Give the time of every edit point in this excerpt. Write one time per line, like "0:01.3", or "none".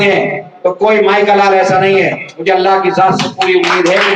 none

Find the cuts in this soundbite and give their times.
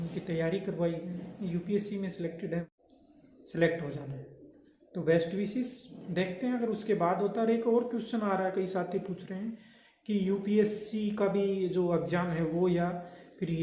0:02.6

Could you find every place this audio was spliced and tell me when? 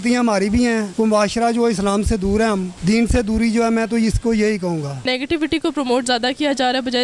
0:00.9
0:02.7
0:05.1

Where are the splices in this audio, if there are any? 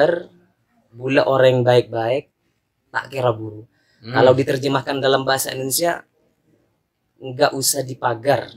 none

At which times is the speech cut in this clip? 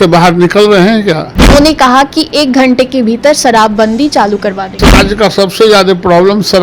0:01.5
0:05.0

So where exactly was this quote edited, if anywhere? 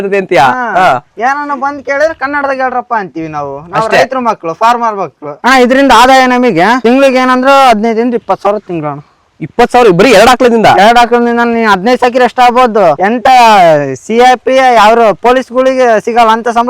0:05.4

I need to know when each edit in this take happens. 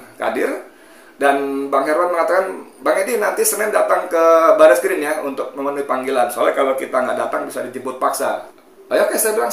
0:08.5

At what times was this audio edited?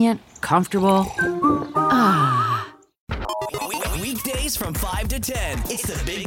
0:03.0

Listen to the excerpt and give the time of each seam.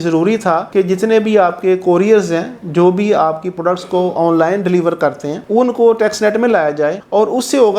none

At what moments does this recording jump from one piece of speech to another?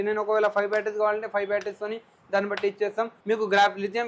0:03.2

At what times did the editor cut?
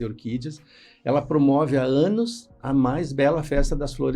none

